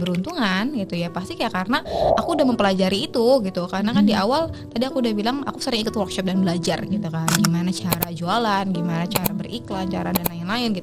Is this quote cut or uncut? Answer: uncut